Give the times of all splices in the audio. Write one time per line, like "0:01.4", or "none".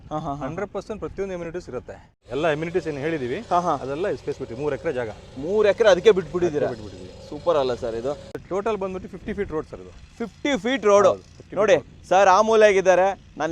0:02.2
0:08.3